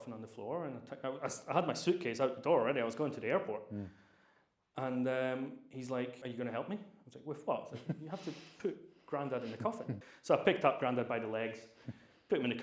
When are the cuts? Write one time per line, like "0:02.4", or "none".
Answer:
0:06.2
0:10.1